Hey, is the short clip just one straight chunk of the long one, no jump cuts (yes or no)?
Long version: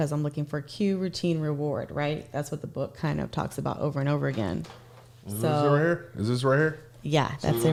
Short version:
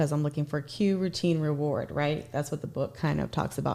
yes